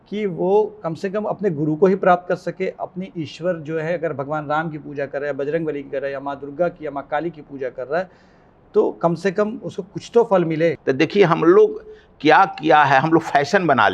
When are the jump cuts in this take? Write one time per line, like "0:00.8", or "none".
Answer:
0:10.8